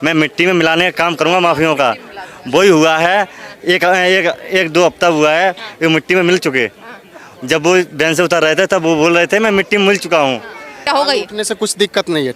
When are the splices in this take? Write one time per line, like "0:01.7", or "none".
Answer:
0:10.8